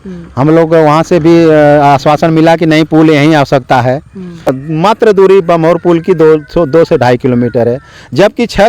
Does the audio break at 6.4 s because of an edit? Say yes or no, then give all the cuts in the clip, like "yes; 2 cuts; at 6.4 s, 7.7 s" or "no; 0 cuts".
no; 1 cut; at 4.5 s